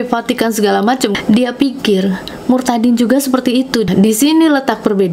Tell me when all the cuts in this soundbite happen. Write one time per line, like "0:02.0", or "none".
0:01.1
0:03.9